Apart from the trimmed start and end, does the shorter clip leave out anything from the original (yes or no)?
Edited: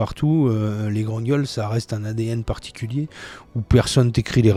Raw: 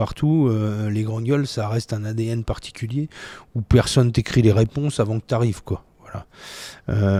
no